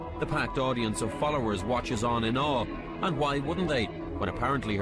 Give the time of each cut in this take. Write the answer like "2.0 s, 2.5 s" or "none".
none